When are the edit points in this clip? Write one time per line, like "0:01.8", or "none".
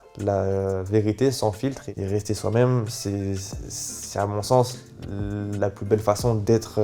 0:01.9

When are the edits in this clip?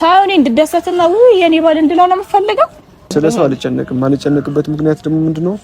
0:03.1

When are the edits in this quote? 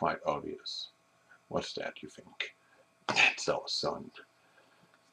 0:03.9

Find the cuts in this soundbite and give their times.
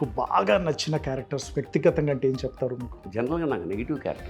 0:03.0

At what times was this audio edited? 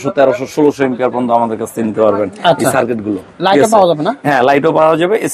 none

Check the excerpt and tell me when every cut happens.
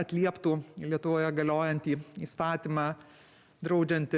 0:03.3

